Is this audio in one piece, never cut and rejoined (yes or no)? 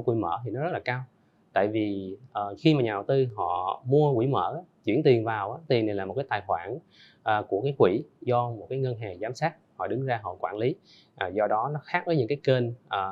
yes